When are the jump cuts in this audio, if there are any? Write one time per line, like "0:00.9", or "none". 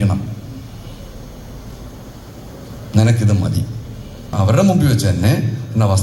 0:04.3